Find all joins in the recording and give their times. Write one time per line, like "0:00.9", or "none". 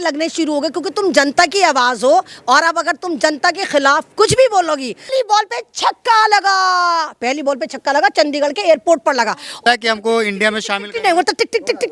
0:05.1
0:09.6